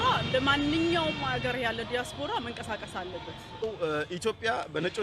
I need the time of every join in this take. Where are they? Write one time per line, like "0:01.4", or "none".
0:03.6